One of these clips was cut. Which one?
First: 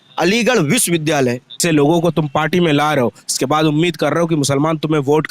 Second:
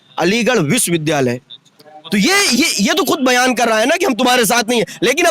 first; 1 cut; at 1.6 s

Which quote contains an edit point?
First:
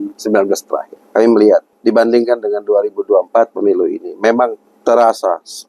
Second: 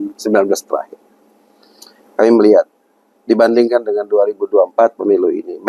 first; 3 cuts; at 1.0 s, 1.7 s, 4.7 s

